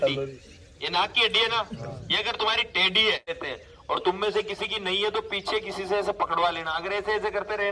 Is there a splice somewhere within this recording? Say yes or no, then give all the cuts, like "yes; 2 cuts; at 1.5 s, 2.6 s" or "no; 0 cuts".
yes; 1 cut; at 3.3 s